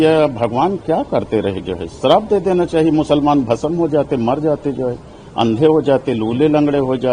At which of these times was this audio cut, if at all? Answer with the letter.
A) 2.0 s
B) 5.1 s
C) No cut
C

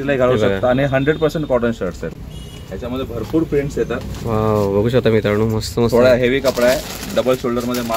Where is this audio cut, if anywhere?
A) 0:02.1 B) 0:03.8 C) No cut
A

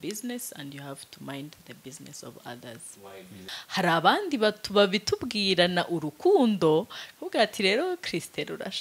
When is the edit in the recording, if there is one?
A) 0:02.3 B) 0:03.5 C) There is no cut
B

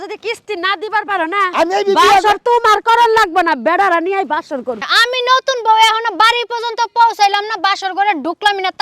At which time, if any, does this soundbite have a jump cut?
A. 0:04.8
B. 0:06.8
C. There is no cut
A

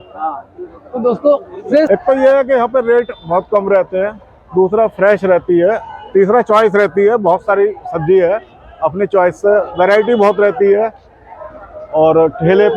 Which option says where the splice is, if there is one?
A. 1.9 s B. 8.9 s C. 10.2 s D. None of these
A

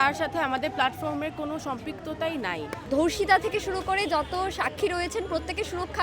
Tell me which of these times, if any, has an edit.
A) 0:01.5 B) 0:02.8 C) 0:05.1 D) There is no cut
B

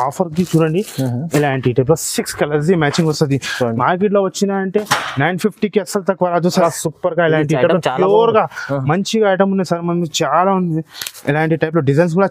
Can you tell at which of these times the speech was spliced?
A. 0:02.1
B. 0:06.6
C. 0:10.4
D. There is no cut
B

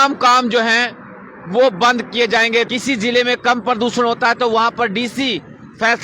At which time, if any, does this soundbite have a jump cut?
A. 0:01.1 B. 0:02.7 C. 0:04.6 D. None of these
B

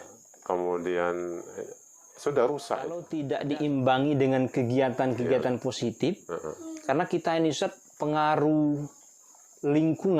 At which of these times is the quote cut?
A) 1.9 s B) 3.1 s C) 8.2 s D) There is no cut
B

